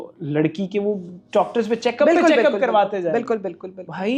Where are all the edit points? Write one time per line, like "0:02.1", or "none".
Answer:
none